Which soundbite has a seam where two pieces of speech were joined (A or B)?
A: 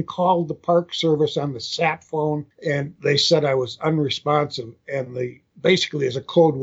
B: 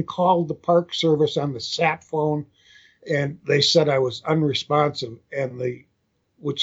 A